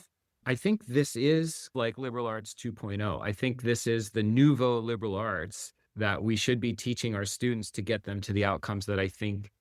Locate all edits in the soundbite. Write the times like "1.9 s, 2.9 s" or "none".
4.1 s, 8.3 s